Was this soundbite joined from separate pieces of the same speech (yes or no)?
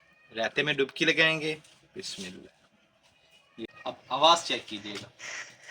yes